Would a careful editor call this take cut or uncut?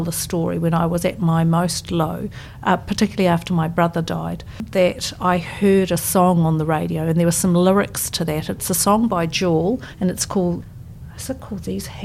cut